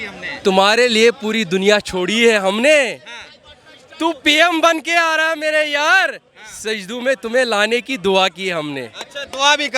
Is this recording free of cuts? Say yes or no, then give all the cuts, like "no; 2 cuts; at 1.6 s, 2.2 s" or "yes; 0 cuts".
yes; 0 cuts